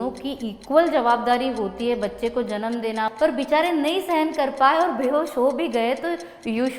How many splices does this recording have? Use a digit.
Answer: 1